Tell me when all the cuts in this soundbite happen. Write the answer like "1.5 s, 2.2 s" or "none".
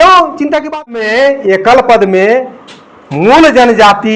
1.2 s